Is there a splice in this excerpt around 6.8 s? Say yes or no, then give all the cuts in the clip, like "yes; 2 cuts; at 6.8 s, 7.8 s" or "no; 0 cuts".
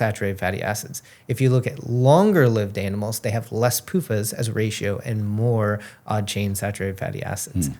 no; 0 cuts